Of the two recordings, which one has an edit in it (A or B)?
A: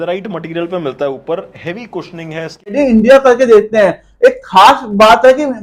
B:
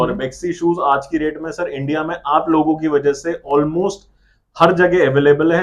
A